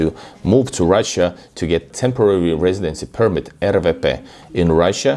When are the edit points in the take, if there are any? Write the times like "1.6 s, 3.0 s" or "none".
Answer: 1.9 s